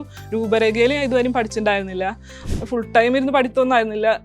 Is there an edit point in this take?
yes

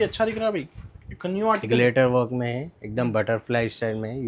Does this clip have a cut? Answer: no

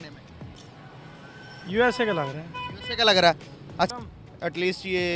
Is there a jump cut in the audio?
yes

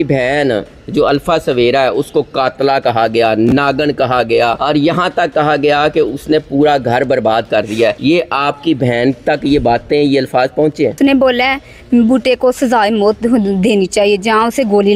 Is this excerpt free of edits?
no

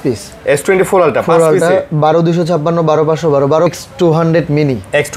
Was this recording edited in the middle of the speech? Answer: yes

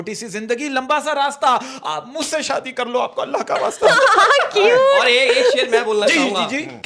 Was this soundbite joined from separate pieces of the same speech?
no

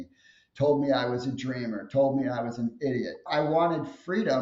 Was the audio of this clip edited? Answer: yes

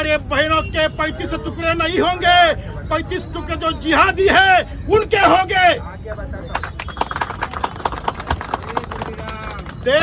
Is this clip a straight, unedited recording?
yes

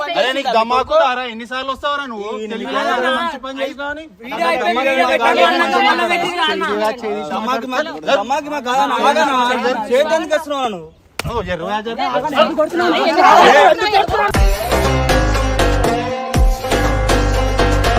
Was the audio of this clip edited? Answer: no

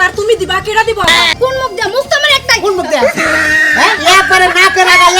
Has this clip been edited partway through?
yes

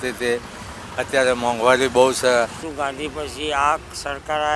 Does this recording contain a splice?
yes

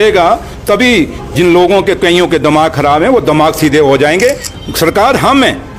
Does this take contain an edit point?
yes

